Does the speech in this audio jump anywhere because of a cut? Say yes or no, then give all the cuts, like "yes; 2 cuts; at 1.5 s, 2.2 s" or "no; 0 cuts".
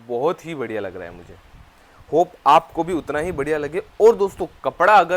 no; 0 cuts